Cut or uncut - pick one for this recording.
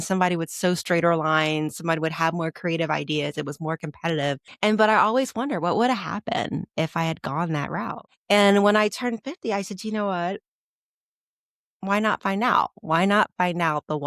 cut